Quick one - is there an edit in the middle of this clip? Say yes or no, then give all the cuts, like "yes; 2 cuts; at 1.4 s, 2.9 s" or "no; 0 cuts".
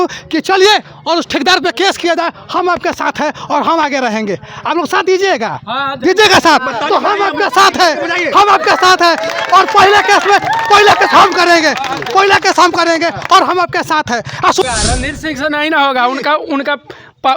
yes; 1 cut; at 14.6 s